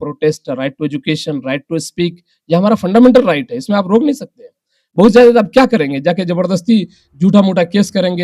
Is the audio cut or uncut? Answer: uncut